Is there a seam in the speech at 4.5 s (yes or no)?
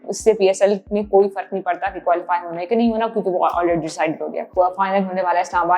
yes